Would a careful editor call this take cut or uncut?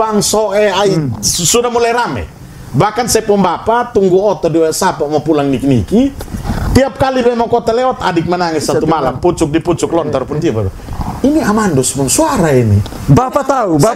uncut